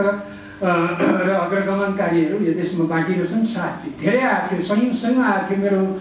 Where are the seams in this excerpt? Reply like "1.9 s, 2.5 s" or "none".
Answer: 3.9 s